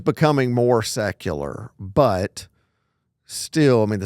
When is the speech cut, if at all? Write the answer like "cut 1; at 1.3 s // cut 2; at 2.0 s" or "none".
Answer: none